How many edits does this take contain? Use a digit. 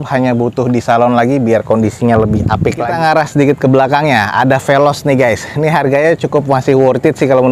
1